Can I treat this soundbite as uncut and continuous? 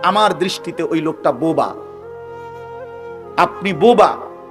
no; 2 cuts; at 1.8 s, 3.3 s

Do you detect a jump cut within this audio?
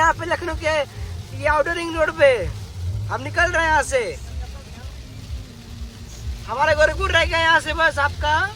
no; 0 cuts

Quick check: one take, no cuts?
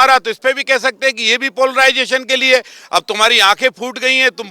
yes; 0 cuts

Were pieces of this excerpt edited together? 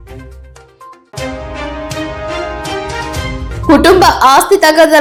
no; 0 cuts

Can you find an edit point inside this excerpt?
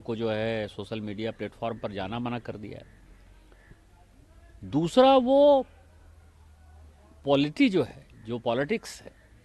no; 0 cuts

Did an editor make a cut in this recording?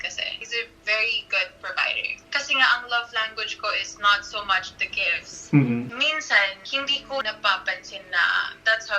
yes; 3 cuts; at 2.1 s, 5.9 s, 7.2 s

